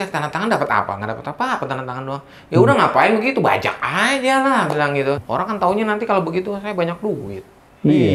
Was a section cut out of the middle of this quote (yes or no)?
yes